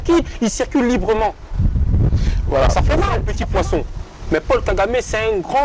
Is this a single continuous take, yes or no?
no